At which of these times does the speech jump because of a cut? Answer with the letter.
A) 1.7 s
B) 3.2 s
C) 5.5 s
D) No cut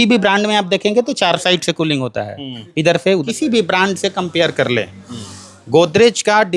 B